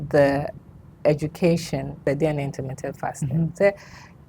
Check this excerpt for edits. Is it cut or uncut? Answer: cut